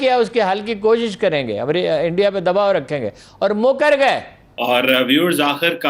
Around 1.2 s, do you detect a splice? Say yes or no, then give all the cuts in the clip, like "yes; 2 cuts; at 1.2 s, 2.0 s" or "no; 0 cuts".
no; 1 cut; at 4.6 s